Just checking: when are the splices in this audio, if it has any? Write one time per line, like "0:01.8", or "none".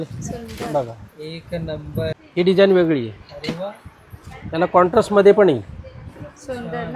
0:02.2